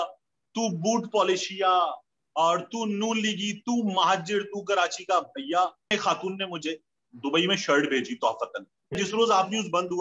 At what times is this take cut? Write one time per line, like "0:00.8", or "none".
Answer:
0:05.9
0:09.0